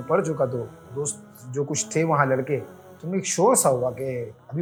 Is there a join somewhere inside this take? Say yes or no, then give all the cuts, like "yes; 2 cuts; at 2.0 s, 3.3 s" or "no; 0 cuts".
no; 0 cuts